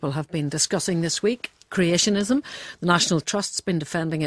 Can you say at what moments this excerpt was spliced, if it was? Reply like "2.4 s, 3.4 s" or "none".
none